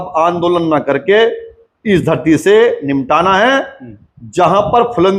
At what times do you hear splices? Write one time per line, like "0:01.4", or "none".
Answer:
none